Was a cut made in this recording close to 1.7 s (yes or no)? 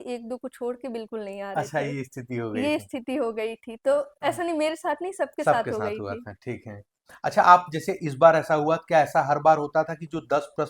no